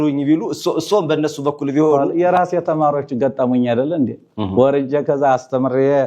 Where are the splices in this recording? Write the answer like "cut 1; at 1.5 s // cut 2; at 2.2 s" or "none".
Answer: cut 1; at 2.0 s